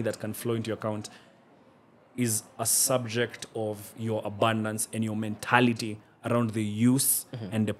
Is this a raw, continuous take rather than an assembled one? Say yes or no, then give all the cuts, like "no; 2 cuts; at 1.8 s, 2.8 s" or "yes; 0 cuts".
yes; 0 cuts